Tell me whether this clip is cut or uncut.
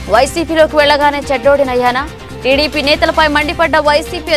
uncut